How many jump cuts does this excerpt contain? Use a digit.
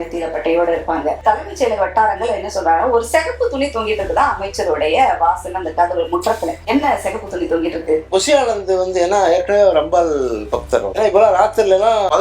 4